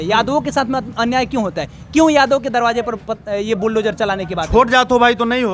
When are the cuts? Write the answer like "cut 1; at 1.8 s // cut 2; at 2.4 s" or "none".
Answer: none